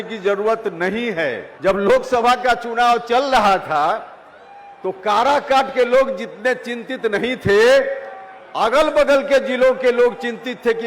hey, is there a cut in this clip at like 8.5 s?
no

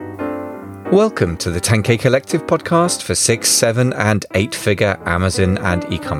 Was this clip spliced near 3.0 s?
no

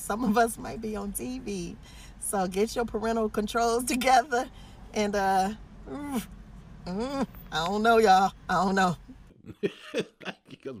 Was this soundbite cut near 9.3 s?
yes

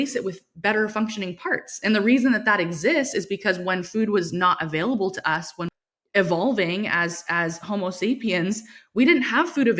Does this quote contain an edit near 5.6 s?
yes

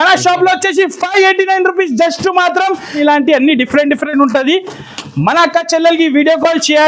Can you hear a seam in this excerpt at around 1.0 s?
no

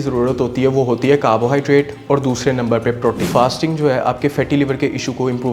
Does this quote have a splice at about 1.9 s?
no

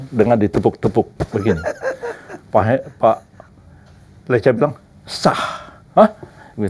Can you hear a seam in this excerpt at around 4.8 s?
no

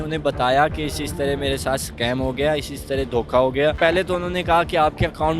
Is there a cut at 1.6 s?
no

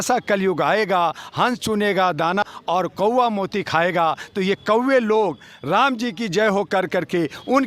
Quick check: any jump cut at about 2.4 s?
yes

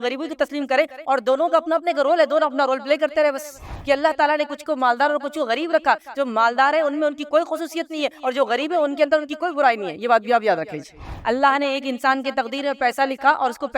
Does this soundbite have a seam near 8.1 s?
no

